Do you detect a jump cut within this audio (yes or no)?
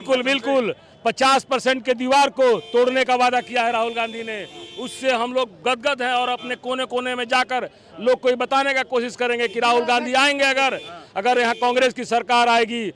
no